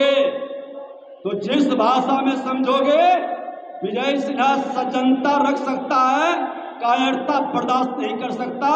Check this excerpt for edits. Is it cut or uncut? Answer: uncut